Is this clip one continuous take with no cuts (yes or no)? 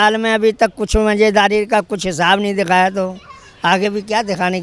yes